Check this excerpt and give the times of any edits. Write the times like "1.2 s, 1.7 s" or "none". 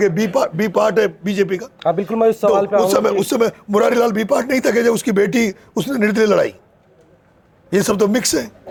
none